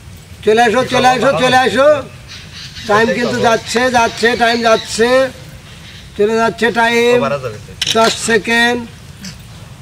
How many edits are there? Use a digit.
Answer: 0